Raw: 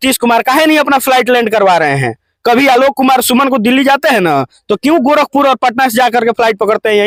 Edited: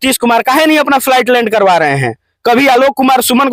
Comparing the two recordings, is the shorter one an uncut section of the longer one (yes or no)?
yes